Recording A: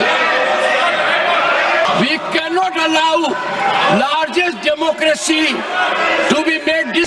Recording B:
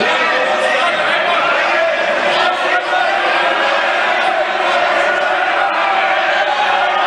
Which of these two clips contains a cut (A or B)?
A